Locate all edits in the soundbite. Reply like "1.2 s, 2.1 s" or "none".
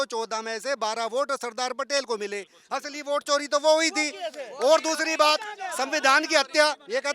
none